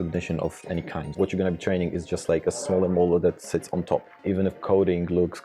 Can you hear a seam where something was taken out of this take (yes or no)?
yes